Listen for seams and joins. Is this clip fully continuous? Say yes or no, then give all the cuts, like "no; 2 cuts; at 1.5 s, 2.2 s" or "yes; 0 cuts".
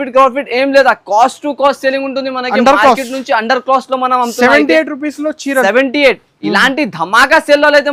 yes; 0 cuts